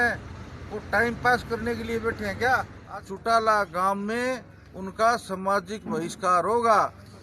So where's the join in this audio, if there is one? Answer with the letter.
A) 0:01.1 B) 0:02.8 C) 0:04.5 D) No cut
B